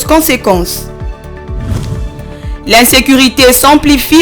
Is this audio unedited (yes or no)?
yes